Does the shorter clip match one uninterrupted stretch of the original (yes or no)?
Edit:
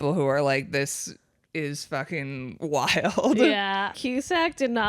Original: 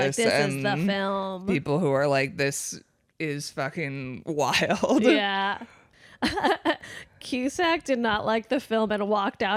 no